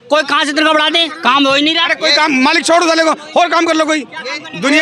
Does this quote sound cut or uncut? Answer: uncut